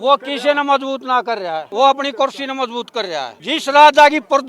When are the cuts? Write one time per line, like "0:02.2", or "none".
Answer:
0:01.6
0:03.4

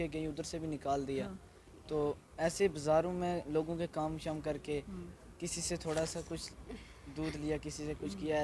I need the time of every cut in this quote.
none

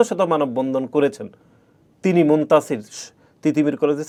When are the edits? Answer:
none

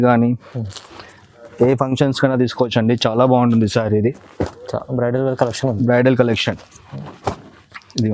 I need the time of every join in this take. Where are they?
none

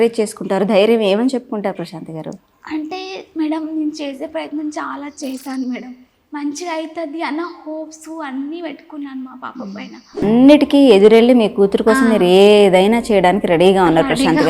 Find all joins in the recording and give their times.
0:10.2

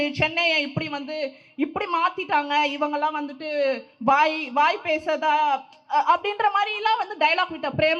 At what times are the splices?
none

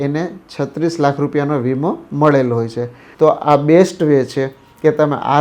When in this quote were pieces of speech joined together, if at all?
0:03.0

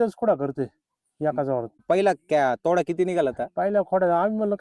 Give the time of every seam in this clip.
0:01.8

